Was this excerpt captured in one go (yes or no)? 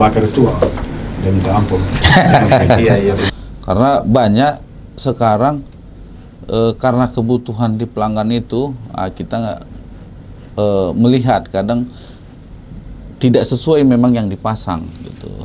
no